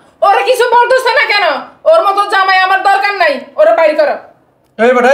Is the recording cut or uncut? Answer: uncut